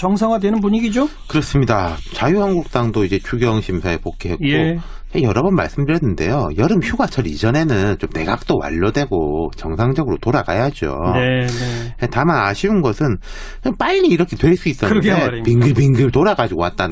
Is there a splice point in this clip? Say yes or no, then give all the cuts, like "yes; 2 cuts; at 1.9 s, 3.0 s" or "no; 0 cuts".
no; 0 cuts